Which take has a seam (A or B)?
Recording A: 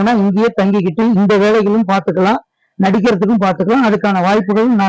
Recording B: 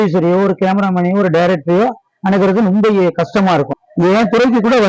B